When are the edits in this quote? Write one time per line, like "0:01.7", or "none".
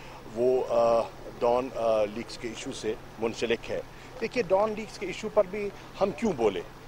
0:03.9